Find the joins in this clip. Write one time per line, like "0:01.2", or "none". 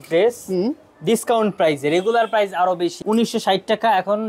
0:03.0